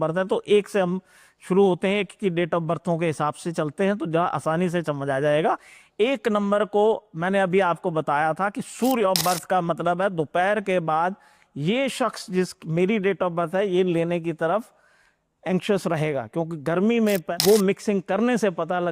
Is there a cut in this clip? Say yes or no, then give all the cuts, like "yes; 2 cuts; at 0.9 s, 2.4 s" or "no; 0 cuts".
yes; 2 cuts; at 9.0 s, 17.3 s